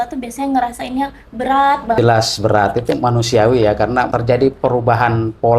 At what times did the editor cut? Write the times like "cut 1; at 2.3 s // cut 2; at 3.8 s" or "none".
cut 1; at 2.0 s // cut 2; at 4.1 s